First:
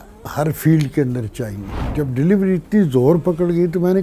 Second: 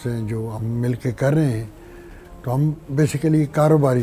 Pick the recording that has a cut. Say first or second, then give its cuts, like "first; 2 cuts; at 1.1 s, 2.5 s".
first; 1 cut; at 1.9 s